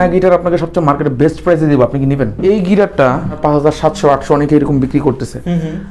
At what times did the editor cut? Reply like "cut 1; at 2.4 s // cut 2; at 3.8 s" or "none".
cut 1; at 2.4 s // cut 2; at 3.4 s